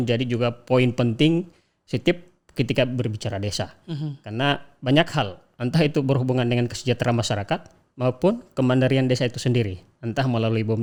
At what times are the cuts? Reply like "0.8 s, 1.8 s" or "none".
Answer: none